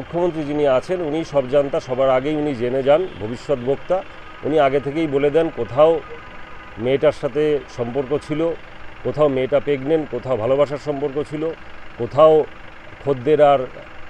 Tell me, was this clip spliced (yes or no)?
no